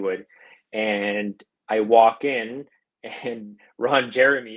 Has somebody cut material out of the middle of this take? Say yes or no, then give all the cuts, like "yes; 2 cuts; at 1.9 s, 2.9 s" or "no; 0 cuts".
no; 0 cuts